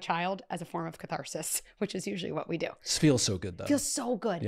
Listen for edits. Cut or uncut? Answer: uncut